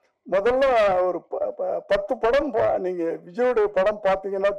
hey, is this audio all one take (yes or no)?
yes